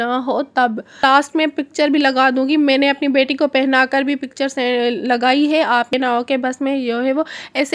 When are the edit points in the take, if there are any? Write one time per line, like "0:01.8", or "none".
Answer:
0:01.0
0:05.9